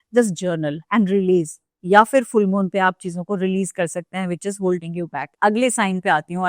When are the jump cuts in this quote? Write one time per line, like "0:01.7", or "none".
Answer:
0:05.2

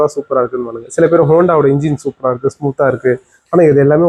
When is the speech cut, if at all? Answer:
none

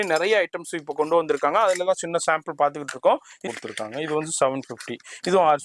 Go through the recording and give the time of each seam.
0:03.4

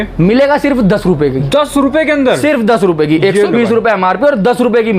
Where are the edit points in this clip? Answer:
none

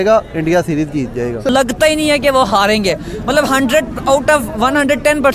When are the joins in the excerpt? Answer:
0:01.5

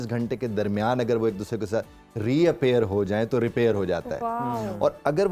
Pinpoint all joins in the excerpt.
none

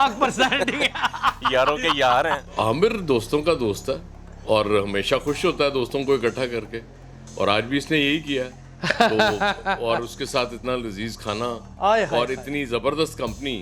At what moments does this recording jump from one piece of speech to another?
0:02.5

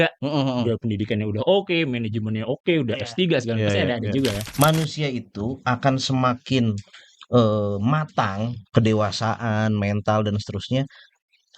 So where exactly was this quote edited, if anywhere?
0:04.4

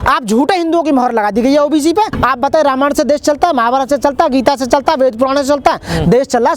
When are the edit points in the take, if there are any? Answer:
0:02.1

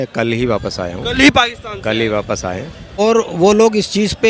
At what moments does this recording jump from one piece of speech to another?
0:03.0

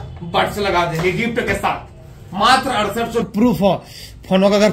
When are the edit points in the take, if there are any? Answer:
0:03.3

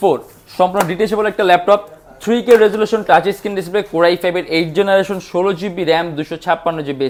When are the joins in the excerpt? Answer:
none

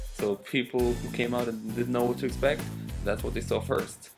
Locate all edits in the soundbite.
0:01.6

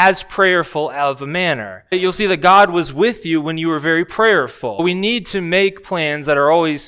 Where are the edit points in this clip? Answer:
0:01.9
0:04.8

